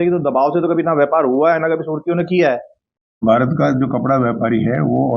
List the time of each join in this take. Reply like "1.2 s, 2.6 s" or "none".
3.2 s